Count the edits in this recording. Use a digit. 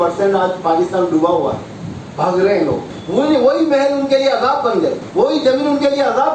2